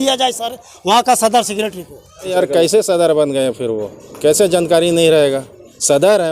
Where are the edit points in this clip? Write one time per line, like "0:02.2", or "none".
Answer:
0:02.3